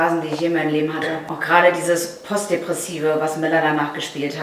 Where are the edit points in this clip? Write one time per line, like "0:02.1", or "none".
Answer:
0:01.3